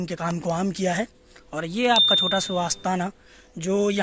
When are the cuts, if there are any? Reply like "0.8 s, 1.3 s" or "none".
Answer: none

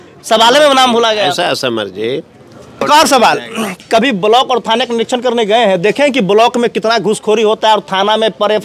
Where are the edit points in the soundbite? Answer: 2.8 s

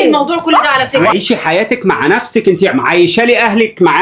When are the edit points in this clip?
1.1 s

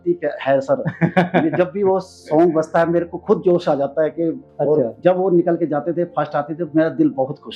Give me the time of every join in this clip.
4.5 s

